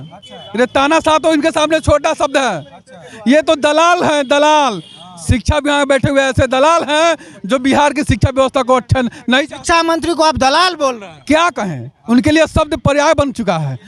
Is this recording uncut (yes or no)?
yes